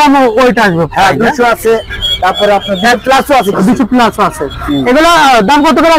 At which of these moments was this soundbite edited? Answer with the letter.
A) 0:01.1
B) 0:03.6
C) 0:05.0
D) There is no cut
D